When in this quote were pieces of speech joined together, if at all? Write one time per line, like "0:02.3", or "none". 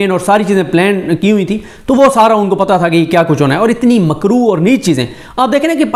none